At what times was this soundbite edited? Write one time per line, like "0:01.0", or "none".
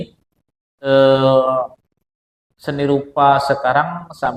none